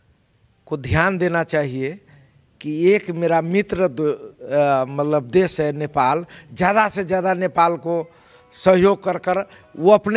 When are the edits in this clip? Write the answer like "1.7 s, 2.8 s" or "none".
none